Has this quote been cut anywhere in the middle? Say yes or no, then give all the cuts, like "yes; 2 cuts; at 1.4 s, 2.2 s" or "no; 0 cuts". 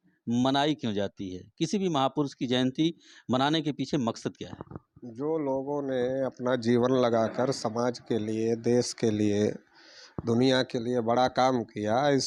no; 0 cuts